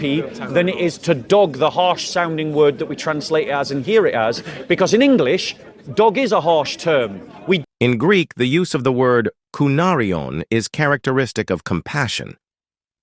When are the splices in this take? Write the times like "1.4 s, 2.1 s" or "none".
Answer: 7.6 s